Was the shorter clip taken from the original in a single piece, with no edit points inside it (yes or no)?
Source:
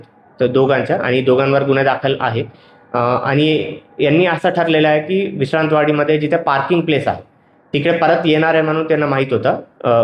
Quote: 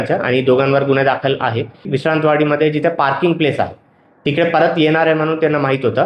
no